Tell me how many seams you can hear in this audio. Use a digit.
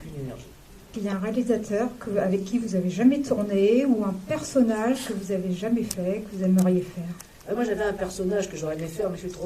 1